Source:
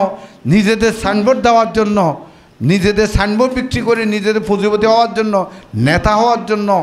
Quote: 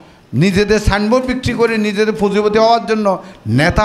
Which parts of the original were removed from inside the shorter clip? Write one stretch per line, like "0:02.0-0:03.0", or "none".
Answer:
none